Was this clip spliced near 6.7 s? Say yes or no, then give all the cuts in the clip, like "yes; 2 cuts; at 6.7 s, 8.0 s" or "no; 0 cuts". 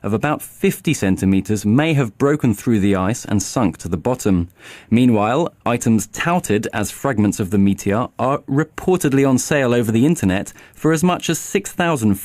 yes; 1 cut; at 6.7 s